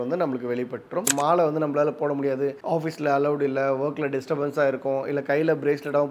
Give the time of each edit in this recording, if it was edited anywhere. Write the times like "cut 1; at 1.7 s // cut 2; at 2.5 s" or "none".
cut 1; at 1.1 s